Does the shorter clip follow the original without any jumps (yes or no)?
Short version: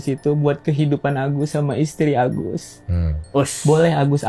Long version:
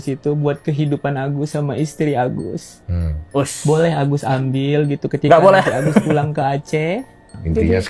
yes